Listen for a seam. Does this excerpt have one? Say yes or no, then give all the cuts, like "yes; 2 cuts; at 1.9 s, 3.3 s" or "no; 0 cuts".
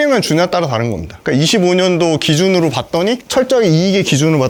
no; 0 cuts